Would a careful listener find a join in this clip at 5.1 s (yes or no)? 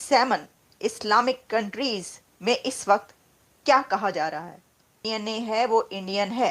yes